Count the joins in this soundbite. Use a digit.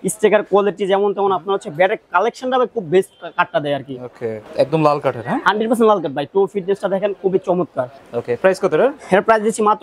2